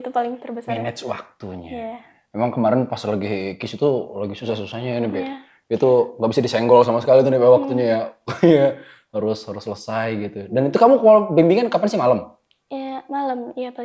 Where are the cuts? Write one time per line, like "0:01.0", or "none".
none